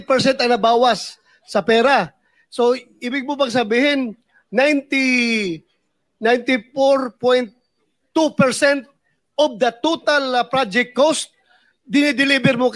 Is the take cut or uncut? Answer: uncut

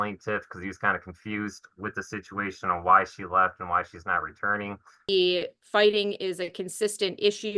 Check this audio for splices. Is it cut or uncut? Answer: cut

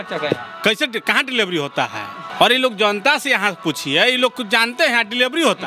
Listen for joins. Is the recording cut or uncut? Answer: uncut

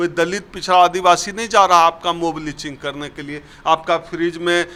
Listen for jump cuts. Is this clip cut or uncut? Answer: uncut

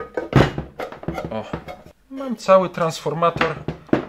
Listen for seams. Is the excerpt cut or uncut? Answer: cut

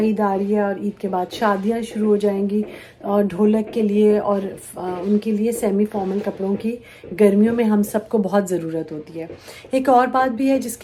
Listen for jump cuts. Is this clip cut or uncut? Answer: uncut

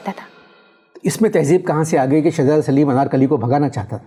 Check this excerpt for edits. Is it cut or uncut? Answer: uncut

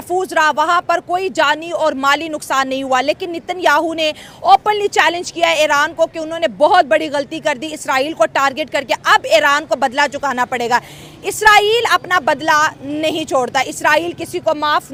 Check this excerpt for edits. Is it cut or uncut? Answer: uncut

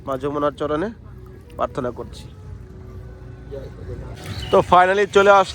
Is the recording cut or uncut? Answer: cut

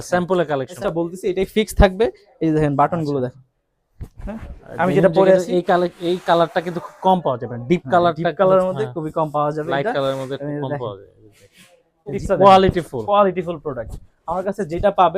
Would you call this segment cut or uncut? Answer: cut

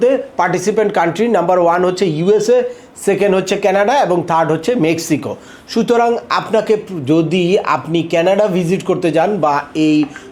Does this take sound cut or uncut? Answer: uncut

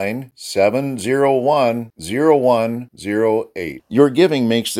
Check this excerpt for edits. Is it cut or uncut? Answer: uncut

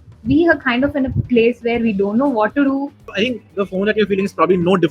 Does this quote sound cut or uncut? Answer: cut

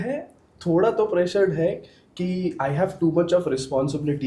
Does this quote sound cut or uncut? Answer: uncut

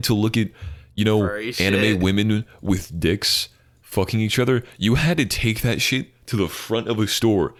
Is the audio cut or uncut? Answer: uncut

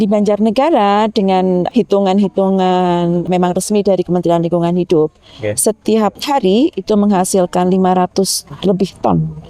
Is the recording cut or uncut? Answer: cut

